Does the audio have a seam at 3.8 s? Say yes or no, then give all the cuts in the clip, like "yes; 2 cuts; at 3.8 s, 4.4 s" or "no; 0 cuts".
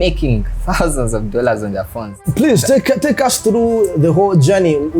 no; 1 cut; at 2.2 s